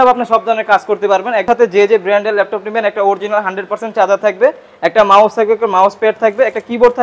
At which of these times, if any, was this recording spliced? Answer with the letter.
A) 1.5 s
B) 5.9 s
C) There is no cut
A